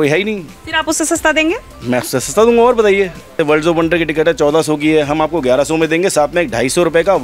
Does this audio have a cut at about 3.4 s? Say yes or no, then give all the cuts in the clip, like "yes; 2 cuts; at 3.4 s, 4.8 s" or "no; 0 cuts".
yes; 1 cut; at 3.4 s